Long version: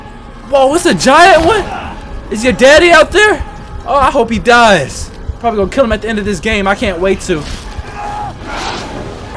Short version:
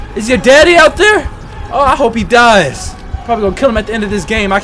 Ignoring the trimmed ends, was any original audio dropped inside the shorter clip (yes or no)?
no